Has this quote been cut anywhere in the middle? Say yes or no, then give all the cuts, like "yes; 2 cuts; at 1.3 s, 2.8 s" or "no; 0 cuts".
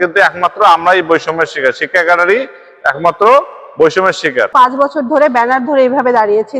yes; 1 cut; at 4.5 s